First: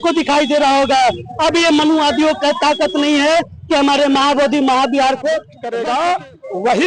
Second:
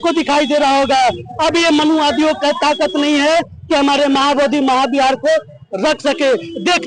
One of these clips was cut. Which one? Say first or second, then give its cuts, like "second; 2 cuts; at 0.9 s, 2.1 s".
first; 1 cut; at 5.6 s